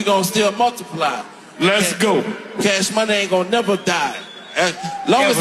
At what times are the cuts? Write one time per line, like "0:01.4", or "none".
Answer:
0:02.4